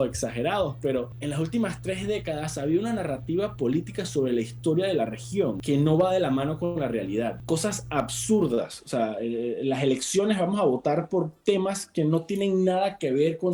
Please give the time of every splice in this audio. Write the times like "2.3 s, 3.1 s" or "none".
1.1 s, 5.6 s, 7.4 s

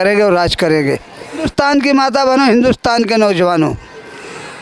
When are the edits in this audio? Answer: 1.5 s

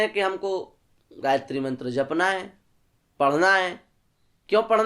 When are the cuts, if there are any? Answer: none

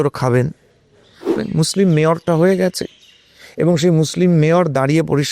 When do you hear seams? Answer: 1.3 s

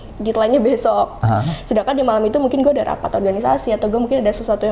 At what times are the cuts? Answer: none

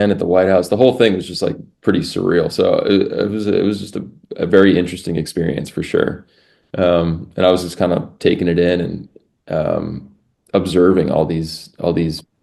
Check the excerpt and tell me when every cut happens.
none

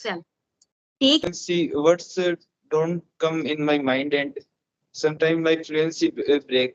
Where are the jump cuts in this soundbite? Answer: 1.3 s

